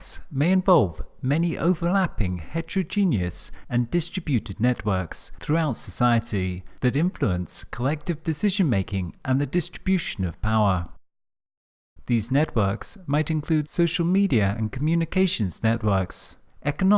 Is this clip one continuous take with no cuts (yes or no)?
yes